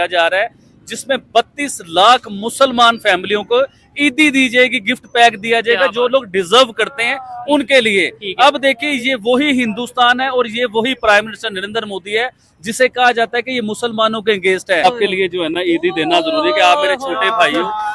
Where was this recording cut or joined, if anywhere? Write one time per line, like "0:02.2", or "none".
0:14.8